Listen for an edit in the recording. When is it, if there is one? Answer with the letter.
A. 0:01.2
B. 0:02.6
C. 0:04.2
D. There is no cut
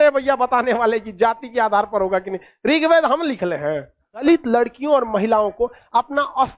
C